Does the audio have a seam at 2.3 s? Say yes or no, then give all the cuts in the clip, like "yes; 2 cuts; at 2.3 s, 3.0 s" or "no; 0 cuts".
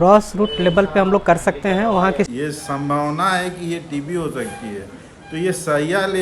yes; 1 cut; at 2.3 s